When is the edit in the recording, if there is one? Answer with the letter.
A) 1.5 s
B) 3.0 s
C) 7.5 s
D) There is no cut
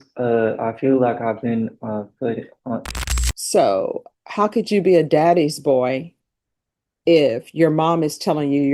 B